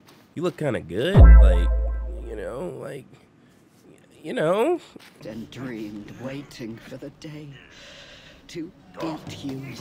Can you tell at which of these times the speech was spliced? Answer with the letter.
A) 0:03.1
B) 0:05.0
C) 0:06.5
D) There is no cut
B